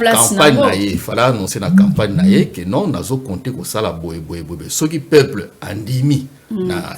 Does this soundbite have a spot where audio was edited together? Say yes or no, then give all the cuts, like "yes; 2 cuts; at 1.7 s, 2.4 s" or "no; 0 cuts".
no; 0 cuts